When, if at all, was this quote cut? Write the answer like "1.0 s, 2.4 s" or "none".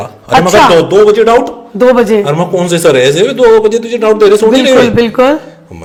none